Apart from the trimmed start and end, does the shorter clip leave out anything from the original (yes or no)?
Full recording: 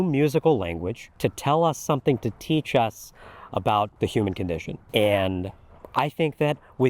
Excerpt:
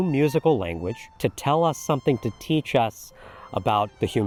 no